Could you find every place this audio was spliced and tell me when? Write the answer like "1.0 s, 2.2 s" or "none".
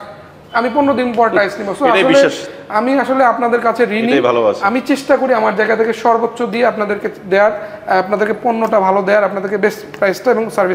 none

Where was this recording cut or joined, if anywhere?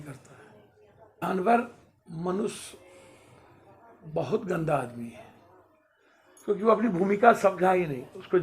1.2 s

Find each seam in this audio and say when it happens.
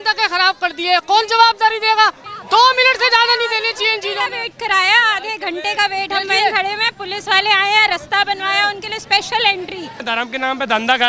2.2 s, 10.0 s

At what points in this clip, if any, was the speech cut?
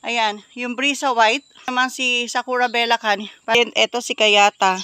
1.7 s, 3.6 s

